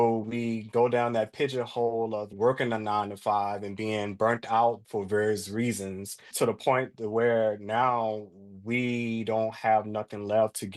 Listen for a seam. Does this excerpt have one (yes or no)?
no